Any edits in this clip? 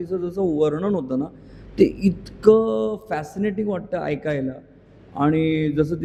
no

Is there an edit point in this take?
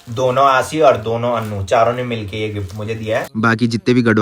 yes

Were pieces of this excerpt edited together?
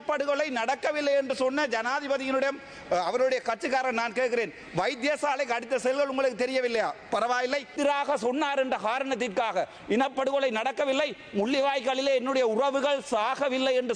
yes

